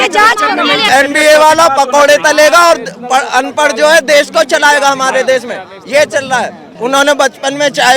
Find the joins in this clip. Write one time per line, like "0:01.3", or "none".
0:00.8
0:06.6